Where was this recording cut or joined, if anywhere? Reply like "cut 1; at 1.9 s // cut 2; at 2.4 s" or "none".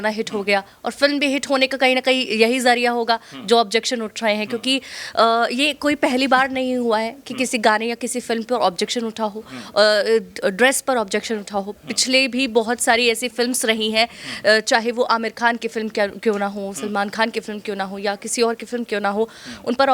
none